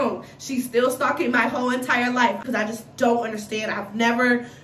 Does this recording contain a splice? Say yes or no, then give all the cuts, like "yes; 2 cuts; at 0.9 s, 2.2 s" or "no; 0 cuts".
yes; 1 cut; at 2.4 s